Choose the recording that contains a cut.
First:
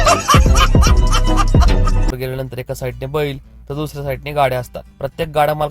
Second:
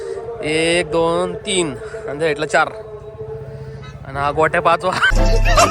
first; 1 cut; at 2.1 s

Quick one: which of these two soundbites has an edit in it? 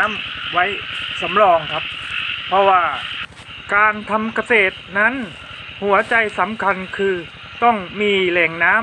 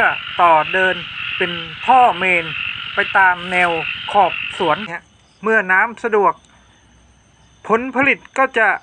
second; 1 cut; at 4.9 s

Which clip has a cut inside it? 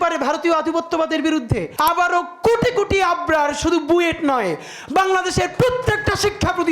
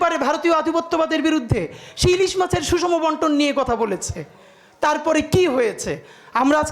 first; 1 cut; at 1.7 s

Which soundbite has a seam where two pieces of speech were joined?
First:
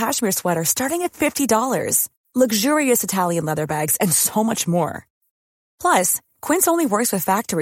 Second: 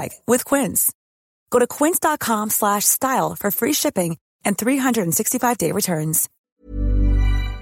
second; 1 cut; at 6.3 s

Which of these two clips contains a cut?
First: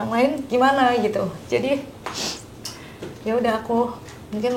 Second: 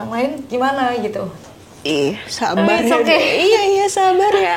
second; 1 cut; at 1.4 s

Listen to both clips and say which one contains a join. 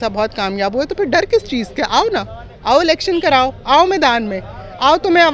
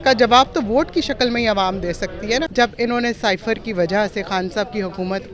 second; 1 cut; at 2.5 s

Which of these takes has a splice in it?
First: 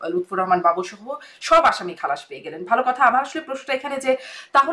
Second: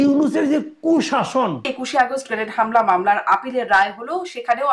second; 1 cut; at 1.7 s

